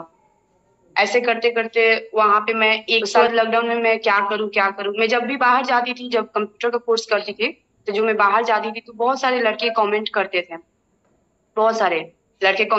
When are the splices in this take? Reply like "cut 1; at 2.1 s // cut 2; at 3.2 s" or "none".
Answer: cut 1; at 3.2 s